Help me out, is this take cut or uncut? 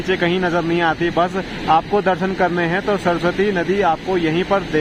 uncut